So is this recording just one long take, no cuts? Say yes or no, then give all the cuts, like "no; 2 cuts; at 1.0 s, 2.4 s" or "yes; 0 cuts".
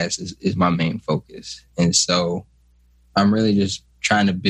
yes; 0 cuts